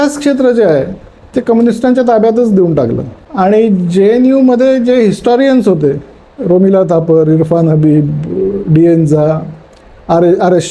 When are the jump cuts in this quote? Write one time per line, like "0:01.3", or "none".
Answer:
0:03.1